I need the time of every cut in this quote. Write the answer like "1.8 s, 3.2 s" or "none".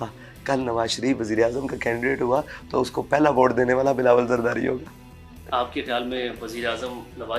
none